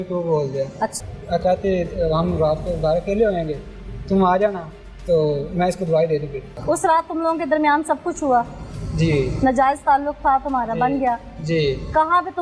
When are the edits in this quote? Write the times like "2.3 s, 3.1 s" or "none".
1.0 s, 6.5 s